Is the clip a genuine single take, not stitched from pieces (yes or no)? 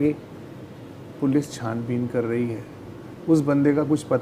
yes